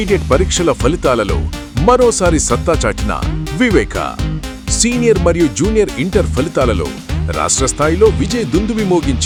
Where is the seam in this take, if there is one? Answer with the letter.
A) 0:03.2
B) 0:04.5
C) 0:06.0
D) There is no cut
D